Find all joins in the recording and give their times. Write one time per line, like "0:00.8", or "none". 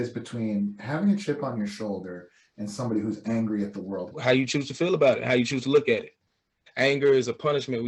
0:04.1
0:06.6